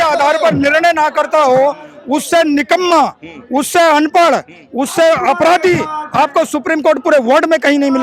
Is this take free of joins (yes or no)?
yes